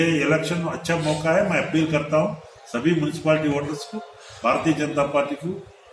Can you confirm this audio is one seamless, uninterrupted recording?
yes; 0 cuts

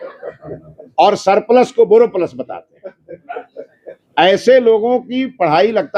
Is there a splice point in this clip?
no; 0 cuts

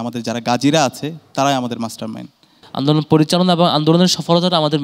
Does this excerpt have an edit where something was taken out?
yes; 1 cut; at 2.6 s

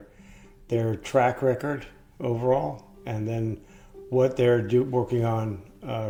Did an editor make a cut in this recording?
no; 0 cuts

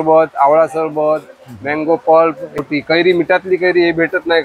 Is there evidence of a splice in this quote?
yes; 1 cut; at 2.6 s

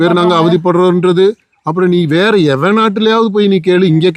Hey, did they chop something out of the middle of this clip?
no; 0 cuts

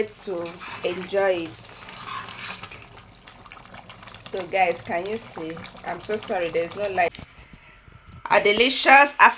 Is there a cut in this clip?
yes; 1 cut; at 7.2 s

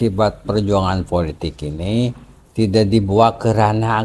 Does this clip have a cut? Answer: no; 0 cuts

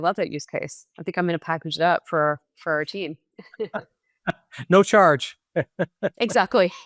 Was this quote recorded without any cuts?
yes; 0 cuts

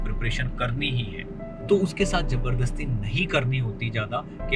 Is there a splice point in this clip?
yes; 1 cut; at 1.5 s

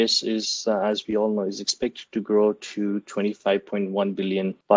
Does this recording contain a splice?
no; 0 cuts

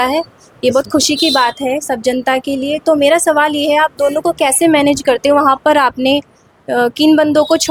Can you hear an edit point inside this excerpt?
no; 0 cuts

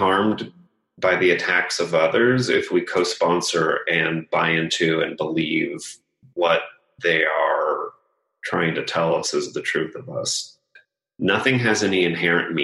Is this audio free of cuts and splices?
no; 1 cut; at 10.8 s

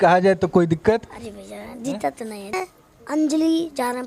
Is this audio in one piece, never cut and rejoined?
no; 1 cut; at 2.5 s

